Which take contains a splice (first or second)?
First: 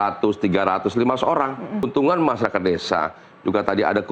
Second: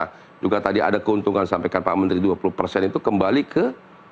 first